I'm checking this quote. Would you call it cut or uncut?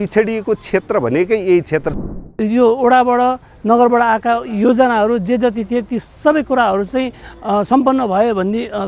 cut